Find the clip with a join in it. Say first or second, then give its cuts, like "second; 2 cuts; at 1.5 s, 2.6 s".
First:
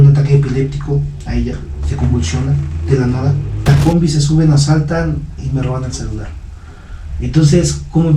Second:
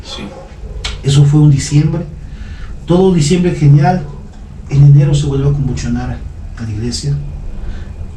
first; 1 cut; at 3.7 s